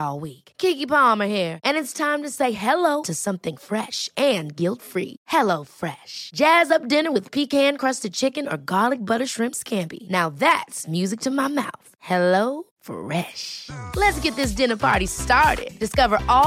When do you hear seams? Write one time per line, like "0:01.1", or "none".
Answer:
none